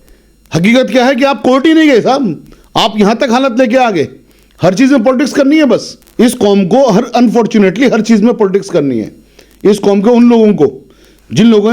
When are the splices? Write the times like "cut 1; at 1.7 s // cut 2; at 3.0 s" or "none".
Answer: cut 1; at 6.0 s